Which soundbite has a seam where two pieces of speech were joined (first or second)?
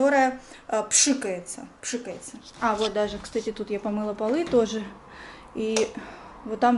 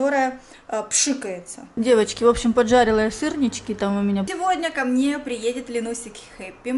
second